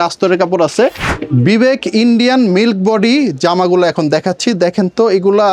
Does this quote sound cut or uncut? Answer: cut